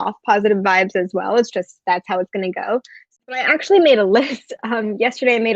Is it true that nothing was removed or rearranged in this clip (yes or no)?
no